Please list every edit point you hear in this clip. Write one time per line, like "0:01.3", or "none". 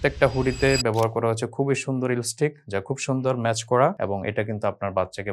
none